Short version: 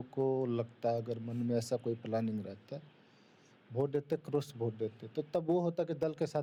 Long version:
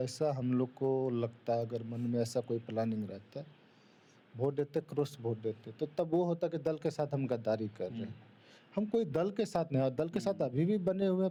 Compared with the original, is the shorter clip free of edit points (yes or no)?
yes